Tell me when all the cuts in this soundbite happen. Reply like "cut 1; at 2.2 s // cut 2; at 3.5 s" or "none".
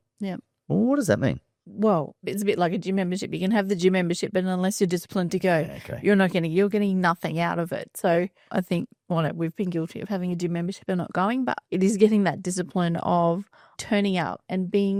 none